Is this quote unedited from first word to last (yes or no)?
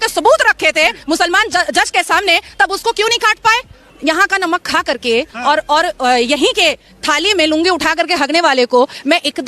no